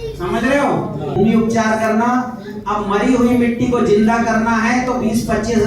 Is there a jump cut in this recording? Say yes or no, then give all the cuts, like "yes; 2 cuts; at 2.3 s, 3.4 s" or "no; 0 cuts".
yes; 1 cut; at 1.2 s